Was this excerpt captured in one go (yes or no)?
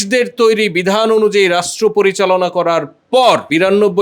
yes